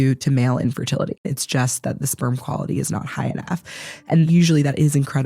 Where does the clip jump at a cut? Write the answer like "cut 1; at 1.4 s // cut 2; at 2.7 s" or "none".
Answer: cut 1; at 1.3 s // cut 2; at 4.1 s